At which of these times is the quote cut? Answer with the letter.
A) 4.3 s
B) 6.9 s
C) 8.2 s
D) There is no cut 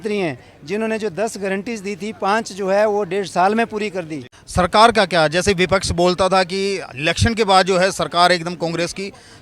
A